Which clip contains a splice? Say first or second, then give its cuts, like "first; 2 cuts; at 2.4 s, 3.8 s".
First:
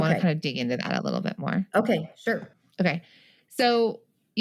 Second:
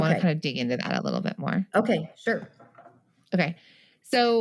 first; 1 cut; at 2.6 s